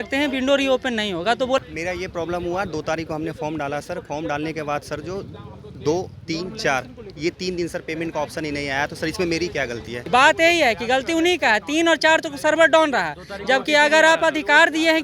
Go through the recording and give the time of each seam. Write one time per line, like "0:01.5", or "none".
0:01.6
0:10.0